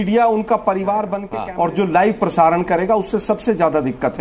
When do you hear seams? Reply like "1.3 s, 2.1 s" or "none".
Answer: 1.2 s